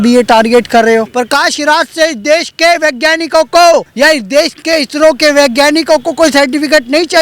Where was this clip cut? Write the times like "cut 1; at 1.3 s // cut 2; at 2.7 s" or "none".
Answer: cut 1; at 1.2 s // cut 2; at 3.9 s